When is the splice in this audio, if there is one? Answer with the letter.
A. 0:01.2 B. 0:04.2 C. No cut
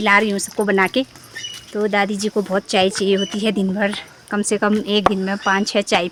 C